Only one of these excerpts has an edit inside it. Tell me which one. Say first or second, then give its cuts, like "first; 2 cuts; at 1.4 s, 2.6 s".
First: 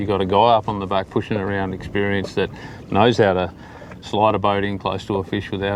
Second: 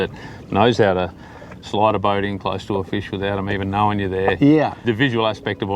second; 1 cut; at 4.8 s